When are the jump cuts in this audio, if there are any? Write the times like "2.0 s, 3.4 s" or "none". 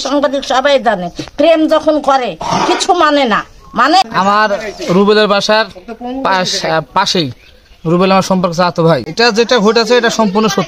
4.1 s, 9.1 s